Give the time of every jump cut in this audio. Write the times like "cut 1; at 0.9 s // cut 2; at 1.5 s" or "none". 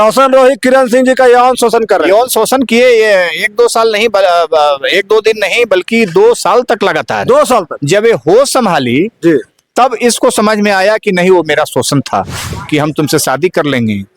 cut 1; at 12.6 s